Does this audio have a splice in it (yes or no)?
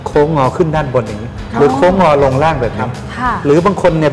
no